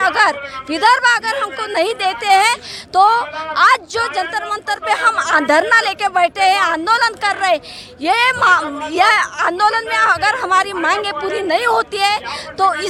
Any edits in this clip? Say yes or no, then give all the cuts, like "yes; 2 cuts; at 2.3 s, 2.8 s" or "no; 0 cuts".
no; 0 cuts